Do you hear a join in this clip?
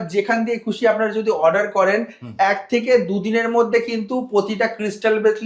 no; 0 cuts

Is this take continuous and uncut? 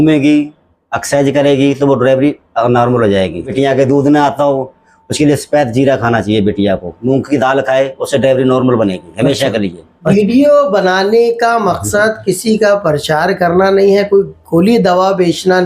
no; 3 cuts; at 3.5 s, 6.9 s, 9.9 s

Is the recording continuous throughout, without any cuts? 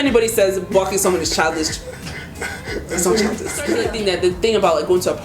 no; 1 cut; at 3.8 s

